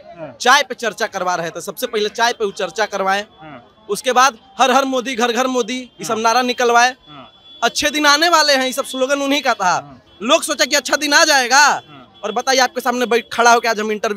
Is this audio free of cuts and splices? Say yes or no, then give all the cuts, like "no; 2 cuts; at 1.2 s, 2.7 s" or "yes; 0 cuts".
yes; 0 cuts